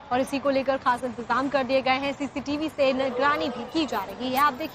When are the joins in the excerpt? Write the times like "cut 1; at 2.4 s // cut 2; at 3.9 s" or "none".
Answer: none